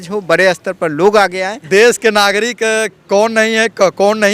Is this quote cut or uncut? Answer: cut